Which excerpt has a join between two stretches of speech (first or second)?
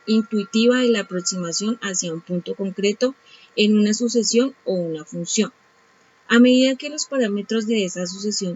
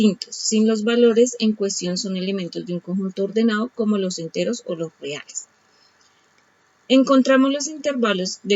second